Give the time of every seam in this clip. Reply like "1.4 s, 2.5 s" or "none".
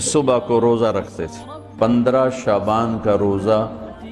1.7 s